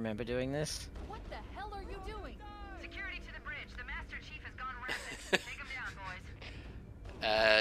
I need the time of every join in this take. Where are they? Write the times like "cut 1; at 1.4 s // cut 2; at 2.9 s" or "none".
none